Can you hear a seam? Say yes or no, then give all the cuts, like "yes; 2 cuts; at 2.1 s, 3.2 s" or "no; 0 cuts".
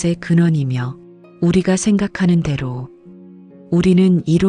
no; 0 cuts